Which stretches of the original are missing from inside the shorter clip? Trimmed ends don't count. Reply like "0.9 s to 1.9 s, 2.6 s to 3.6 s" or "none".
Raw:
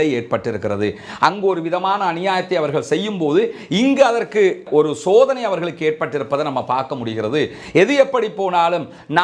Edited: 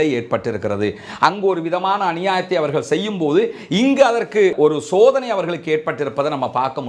4.5 s to 4.7 s